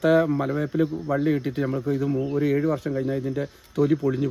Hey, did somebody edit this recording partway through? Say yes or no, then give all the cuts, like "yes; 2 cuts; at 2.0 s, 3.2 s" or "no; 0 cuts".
no; 0 cuts